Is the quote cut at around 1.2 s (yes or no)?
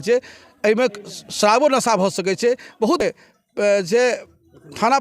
no